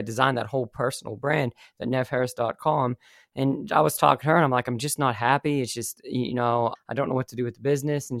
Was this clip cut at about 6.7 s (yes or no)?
yes